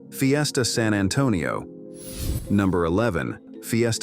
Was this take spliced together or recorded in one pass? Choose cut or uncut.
uncut